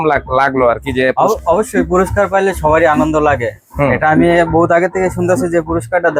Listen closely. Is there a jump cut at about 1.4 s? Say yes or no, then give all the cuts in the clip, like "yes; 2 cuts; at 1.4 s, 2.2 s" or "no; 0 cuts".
no; 0 cuts